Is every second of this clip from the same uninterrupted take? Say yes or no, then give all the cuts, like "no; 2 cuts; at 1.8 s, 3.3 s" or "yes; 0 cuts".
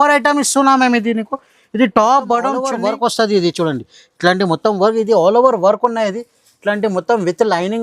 no; 1 cut; at 2.7 s